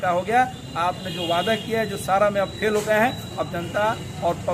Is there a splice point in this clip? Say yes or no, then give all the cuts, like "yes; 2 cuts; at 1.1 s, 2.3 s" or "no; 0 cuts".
no; 0 cuts